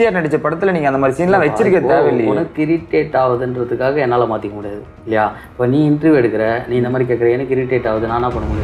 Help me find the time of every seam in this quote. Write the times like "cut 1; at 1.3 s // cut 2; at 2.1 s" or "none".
none